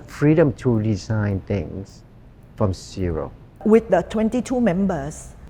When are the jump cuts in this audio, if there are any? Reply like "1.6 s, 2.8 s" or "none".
3.4 s